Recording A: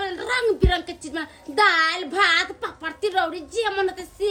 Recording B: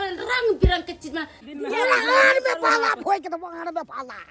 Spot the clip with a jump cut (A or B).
B